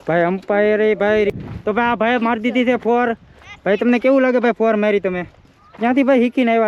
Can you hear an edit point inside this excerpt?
yes; 2 cuts; at 1.3 s, 5.6 s

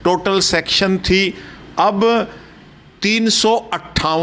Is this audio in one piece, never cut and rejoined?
yes; 0 cuts

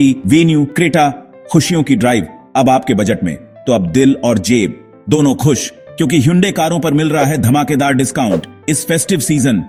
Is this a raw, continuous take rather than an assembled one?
yes; 0 cuts

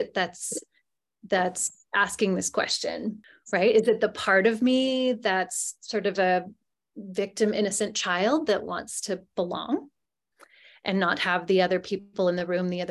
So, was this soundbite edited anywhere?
yes; 1 cut; at 3.3 s

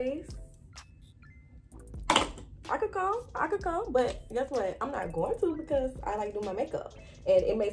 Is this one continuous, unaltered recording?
yes; 0 cuts

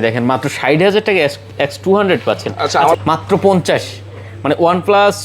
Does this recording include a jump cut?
yes; 1 cut; at 3.0 s

